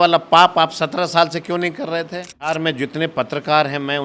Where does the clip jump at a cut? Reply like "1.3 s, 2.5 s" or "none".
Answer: 2.5 s